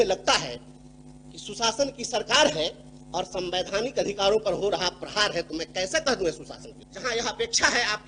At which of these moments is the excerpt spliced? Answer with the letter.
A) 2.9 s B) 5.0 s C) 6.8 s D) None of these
C